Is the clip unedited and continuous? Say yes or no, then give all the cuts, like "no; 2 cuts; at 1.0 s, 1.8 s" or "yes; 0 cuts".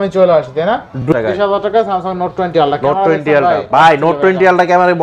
no; 1 cut; at 1.1 s